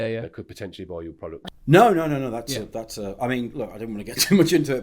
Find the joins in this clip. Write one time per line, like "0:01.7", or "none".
0:01.5

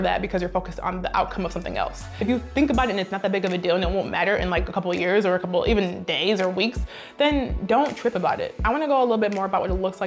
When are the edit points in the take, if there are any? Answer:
0:02.1
0:08.5

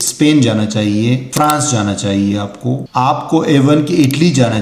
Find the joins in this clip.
0:01.3
0:02.8

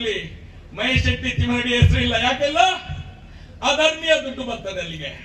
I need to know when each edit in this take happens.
none

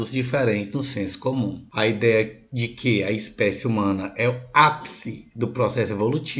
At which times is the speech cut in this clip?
0:01.6

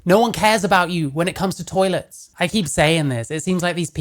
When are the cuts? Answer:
0:02.2

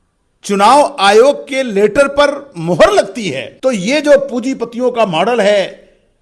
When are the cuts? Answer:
0:03.4

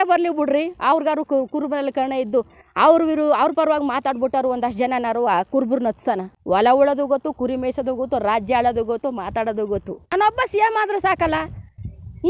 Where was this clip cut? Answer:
0:06.3
0:10.1

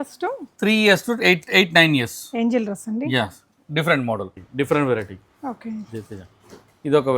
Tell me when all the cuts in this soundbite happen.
0:04.4

